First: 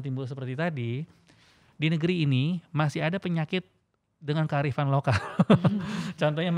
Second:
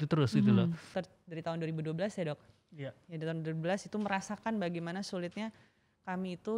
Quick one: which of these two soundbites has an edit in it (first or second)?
second